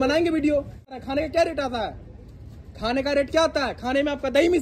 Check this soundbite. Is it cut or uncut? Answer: cut